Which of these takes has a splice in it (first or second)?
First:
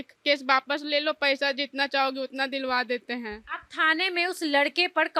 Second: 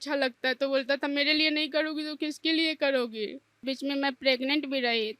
second